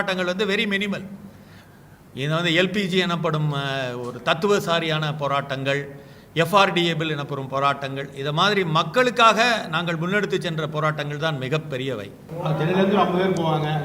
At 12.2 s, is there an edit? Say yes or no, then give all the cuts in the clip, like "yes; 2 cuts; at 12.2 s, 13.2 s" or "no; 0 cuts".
yes; 1 cut; at 12.2 s